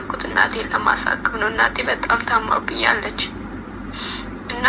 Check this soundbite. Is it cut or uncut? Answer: uncut